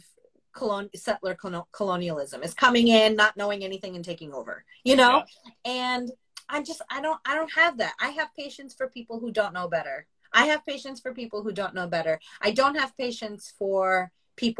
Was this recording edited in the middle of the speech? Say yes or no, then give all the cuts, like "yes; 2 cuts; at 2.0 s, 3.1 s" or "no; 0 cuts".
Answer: yes; 1 cut; at 10.1 s